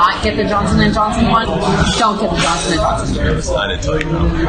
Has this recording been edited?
yes; 1 cut; at 1.4 s

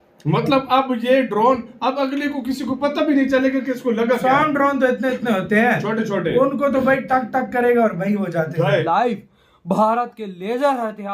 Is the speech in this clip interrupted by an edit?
yes; 1 cut; at 8.8 s

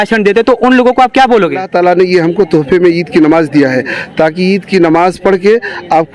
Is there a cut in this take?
yes; 1 cut; at 1.7 s

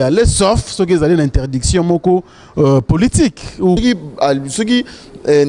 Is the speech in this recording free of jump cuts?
no; 1 cut; at 3.8 s

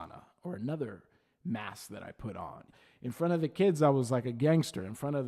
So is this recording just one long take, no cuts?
no; 1 cut; at 2.7 s

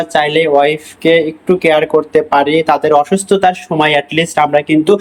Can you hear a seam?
no; 0 cuts

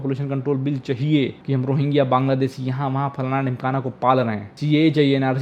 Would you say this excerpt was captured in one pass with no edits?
no; 2 cuts; at 1.4 s, 4.5 s

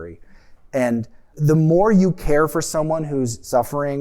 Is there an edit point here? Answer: yes; 1 cut; at 1.3 s

